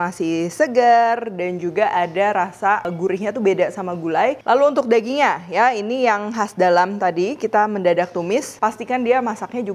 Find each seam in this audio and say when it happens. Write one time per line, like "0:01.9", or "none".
0:02.9
0:04.4
0:08.5